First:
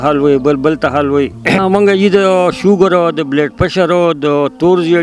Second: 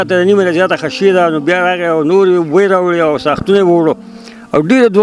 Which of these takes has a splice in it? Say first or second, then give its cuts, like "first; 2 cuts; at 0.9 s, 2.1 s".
first; 1 cut; at 1.6 s